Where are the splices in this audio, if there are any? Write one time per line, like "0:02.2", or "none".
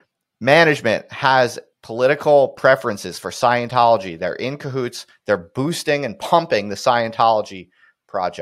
none